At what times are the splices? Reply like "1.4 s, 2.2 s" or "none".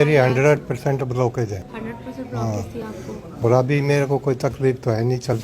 1.7 s